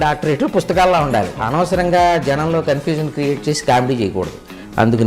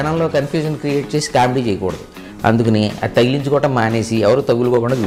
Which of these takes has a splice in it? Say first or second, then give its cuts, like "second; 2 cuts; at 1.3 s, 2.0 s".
first; 1 cut; at 1.4 s